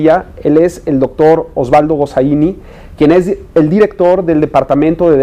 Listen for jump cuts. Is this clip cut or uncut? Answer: cut